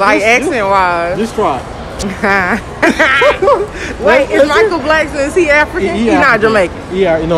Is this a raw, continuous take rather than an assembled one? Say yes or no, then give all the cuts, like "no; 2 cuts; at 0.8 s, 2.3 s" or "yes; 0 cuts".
no; 1 cut; at 1.8 s